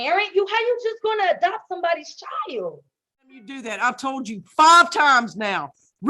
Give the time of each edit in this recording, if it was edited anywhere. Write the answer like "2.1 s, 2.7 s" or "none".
3.6 s